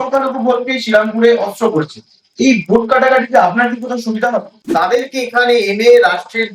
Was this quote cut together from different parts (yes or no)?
yes